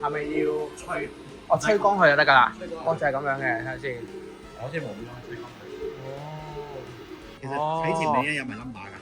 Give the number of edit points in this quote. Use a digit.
1